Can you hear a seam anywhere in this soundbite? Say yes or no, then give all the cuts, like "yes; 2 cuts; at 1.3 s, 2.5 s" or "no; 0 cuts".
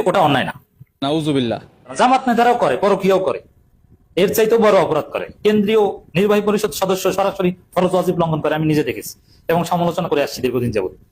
no; 0 cuts